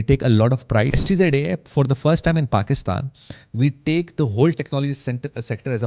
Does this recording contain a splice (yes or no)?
yes